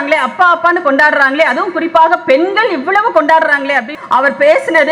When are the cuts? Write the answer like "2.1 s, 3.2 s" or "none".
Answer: 3.9 s